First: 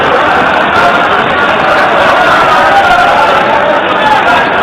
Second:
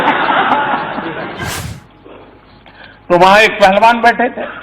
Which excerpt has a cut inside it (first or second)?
second